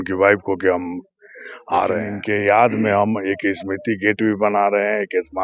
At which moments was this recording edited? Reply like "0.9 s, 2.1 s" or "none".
2.1 s